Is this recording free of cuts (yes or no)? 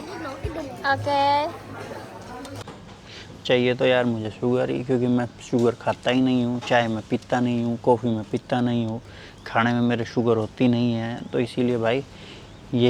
no